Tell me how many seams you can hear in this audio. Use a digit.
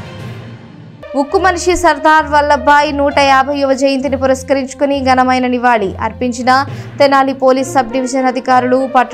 1